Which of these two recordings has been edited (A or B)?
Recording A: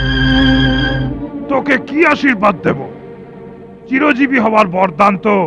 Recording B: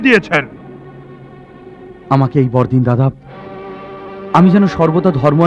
A